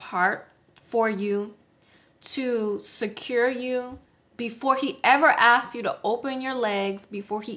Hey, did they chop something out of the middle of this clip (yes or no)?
no